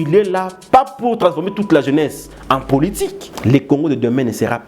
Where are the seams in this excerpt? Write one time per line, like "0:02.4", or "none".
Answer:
0:03.3